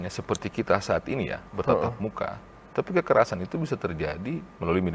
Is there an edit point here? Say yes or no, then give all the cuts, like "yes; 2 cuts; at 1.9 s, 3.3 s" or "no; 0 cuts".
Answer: no; 0 cuts